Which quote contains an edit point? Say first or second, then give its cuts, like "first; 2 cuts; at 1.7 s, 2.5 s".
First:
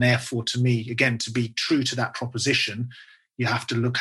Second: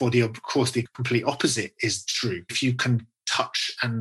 second; 2 cuts; at 1.0 s, 2.5 s